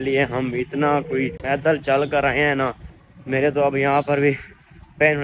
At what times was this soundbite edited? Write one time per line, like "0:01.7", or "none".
0:01.4

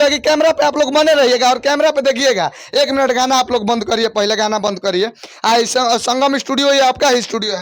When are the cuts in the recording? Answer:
none

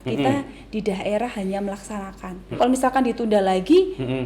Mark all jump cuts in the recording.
0:02.6

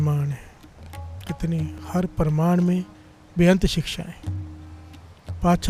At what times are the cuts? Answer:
none

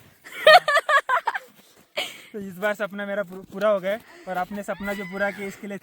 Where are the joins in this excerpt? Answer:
none

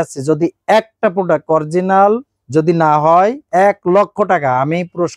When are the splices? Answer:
none

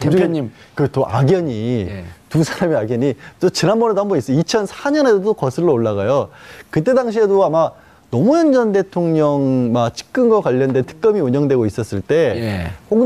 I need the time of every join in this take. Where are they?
0:03.8

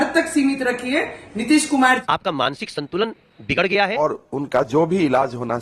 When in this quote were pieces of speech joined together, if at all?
0:02.0
0:04.0

